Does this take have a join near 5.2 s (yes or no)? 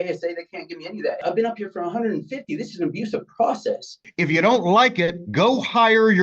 no